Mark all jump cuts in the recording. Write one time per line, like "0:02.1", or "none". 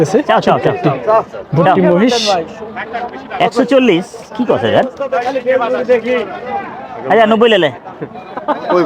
none